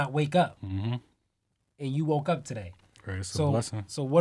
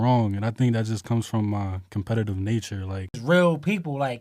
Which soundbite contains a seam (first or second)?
second